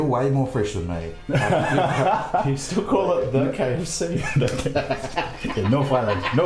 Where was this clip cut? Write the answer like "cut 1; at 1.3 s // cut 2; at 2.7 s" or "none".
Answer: none